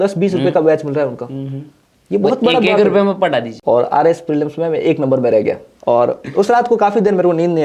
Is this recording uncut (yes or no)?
no